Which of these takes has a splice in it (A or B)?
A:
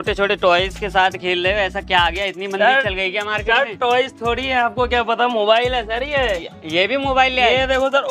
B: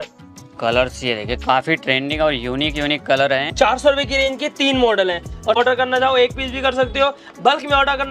B